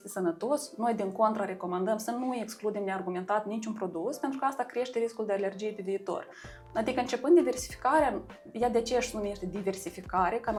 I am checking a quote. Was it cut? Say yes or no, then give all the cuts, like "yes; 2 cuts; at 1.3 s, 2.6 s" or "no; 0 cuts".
no; 0 cuts